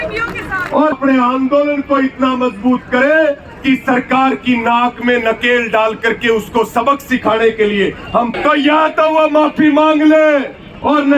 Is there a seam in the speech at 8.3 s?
yes; 2 cuts; at 0.9 s, 8.3 s

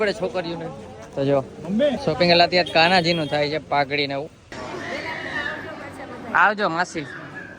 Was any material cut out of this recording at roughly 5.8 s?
no; 2 cuts; at 2.0 s, 4.5 s

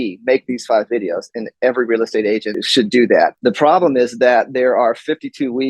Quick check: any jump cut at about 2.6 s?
yes; 2 cuts; at 2.6 s, 3.4 s

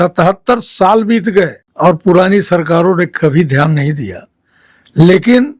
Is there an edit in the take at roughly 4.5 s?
no; 1 cut; at 1.6 s

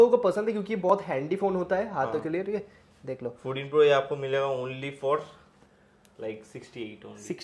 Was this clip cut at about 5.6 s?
no; 0 cuts

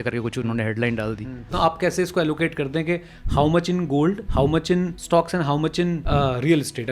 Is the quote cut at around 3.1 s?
no; 3 cuts; at 1.5 s, 4.6 s, 6.0 s

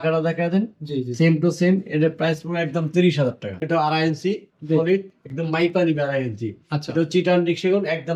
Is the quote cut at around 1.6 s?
no; 1 cut; at 3.6 s

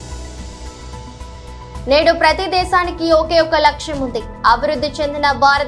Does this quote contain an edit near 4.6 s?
no; 1 cut; at 1.0 s

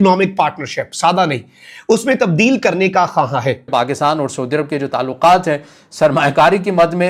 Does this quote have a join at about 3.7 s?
yes; 1 cut; at 3.7 s

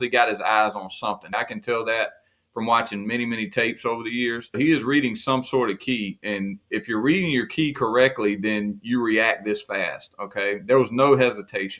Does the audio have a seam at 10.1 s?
no; 3 cuts; at 1.3 s, 4.6 s, 6.2 s

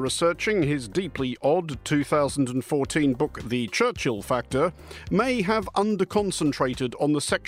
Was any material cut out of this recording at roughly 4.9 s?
yes; 1 cut; at 4.9 s

